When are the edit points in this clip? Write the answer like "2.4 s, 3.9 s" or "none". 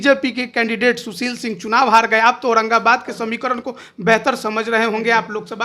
none